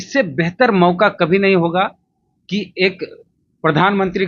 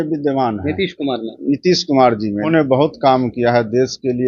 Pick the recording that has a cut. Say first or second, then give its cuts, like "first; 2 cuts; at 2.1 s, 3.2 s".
second; 1 cut; at 2.5 s